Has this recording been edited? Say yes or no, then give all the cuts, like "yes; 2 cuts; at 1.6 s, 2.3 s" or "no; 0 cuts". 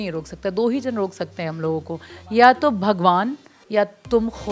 no; 0 cuts